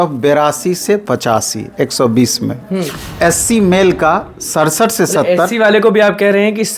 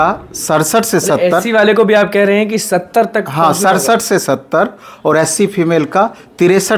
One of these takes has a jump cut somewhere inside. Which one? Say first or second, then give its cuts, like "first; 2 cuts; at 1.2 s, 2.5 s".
first; 1 cut; at 3.0 s